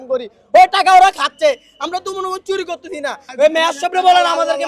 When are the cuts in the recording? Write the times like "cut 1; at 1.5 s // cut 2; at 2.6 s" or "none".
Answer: cut 1; at 3.2 s